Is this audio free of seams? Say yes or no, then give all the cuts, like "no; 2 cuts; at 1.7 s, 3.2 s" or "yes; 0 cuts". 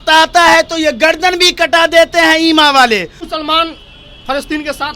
no; 1 cut; at 3.2 s